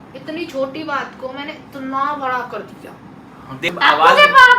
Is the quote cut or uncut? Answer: cut